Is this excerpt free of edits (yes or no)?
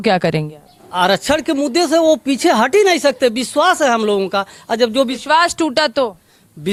yes